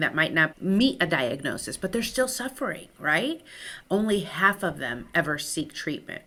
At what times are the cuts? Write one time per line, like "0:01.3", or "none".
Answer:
none